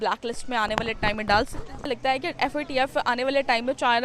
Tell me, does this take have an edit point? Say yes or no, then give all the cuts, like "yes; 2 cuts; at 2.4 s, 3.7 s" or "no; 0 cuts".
yes; 1 cut; at 1.8 s